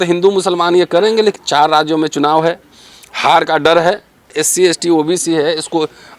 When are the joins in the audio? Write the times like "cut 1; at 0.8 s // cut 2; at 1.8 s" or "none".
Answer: cut 1; at 1.4 s // cut 2; at 4.4 s